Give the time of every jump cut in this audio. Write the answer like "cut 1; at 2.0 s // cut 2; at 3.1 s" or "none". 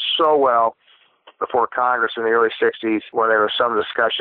cut 1; at 3.1 s